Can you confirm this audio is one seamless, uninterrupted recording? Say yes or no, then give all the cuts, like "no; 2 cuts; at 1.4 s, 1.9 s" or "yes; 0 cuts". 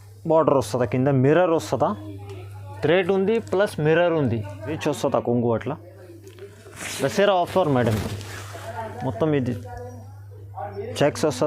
no; 1 cut; at 4.8 s